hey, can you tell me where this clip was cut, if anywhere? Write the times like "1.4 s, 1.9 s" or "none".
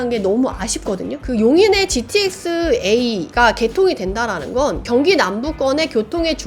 1.2 s